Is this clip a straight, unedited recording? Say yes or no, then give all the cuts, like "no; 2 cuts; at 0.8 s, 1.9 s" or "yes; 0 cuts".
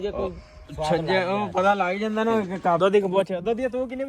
no; 1 cut; at 2.8 s